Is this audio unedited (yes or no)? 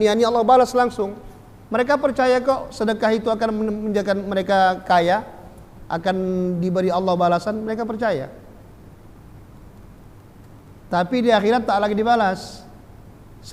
yes